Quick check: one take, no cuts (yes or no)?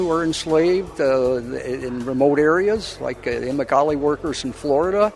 yes